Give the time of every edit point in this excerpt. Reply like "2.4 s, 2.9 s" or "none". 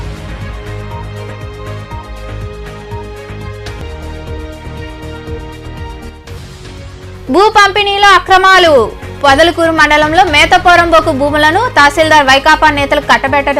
none